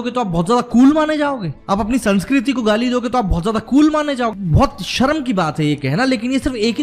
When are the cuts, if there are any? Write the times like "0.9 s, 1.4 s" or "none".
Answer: 1.5 s, 4.3 s

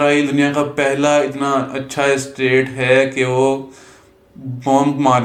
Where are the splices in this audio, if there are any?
none

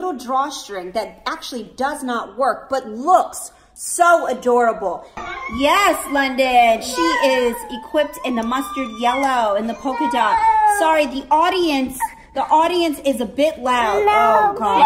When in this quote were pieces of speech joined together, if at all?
5.2 s

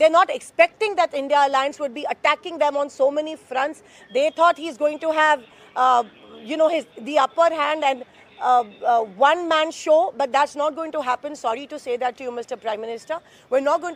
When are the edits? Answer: none

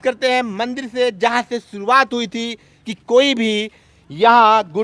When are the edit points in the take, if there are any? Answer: none

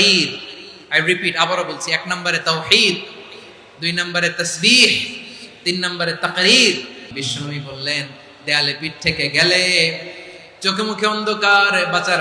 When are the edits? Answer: 7.2 s

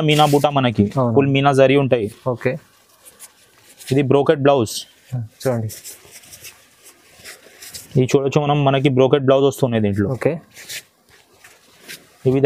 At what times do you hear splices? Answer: none

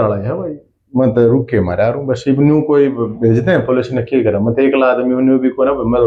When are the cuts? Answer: none

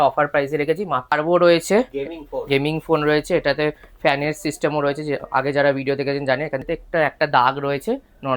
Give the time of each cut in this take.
1.1 s, 6.6 s

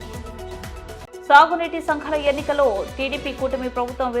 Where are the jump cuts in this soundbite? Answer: 1.0 s

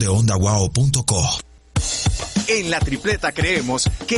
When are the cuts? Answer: 1.5 s

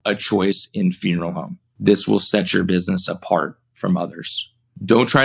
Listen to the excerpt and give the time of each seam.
none

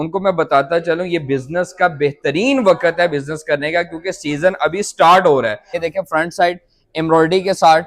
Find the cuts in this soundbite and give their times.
5.8 s

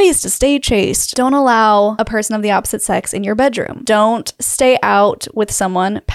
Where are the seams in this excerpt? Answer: 1.0 s, 1.9 s, 3.8 s

